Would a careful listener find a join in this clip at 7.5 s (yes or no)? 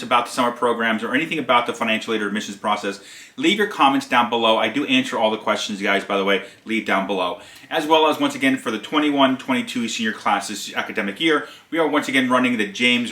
yes